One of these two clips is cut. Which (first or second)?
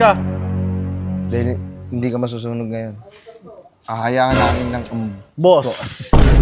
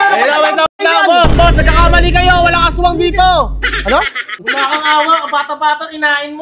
second